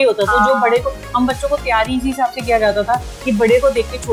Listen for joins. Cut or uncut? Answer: uncut